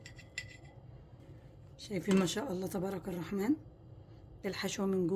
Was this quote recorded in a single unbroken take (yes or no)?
no